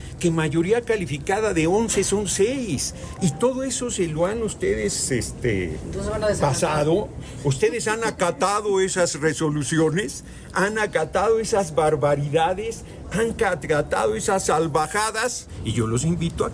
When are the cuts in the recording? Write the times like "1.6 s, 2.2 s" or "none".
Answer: 15.6 s